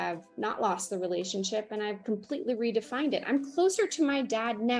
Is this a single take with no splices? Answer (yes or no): yes